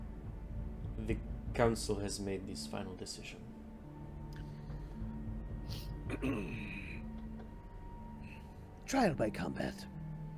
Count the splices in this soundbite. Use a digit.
1